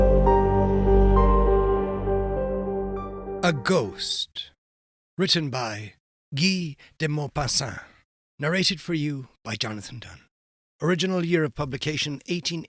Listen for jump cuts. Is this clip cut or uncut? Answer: cut